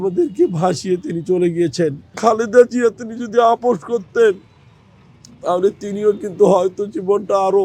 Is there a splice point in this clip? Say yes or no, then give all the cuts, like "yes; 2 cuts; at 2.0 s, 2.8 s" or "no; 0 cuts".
yes; 1 cut; at 2.0 s